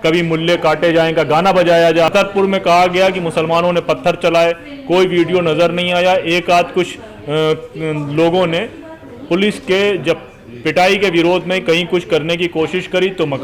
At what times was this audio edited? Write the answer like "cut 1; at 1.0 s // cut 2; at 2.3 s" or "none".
cut 1; at 2.1 s